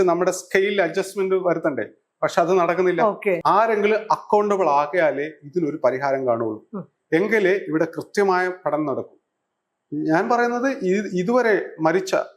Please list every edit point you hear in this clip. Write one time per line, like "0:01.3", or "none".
0:03.4